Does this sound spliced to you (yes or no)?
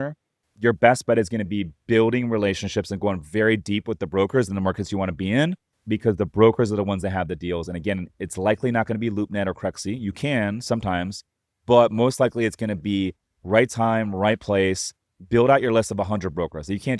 yes